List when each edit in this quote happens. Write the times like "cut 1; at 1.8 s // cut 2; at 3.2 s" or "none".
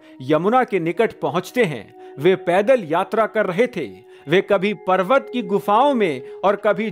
none